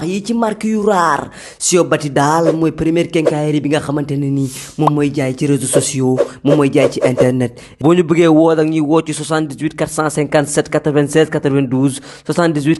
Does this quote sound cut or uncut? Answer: uncut